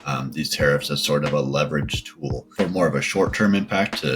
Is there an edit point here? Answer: no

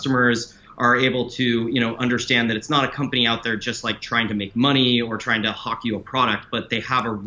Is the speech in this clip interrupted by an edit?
no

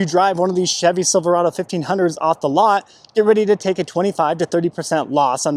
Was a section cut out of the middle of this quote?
no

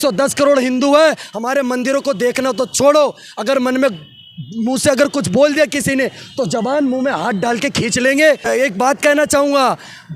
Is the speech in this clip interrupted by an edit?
yes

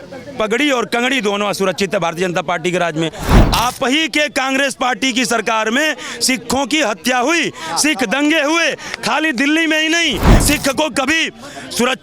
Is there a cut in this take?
yes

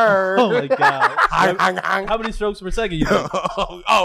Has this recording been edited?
yes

